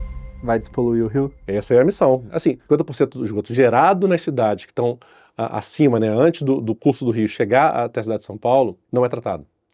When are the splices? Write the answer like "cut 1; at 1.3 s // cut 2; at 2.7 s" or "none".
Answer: cut 1; at 1.4 s // cut 2; at 2.4 s // cut 3; at 8.8 s